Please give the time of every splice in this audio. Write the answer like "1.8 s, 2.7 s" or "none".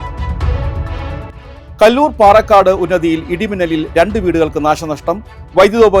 1.3 s